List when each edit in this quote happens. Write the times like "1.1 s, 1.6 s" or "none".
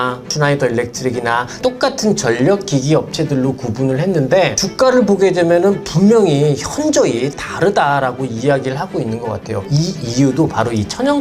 9.7 s